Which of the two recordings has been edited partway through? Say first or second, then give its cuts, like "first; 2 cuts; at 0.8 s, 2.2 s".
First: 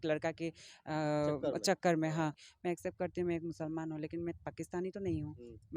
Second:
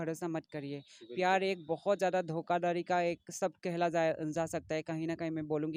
first; 1 cut; at 2.4 s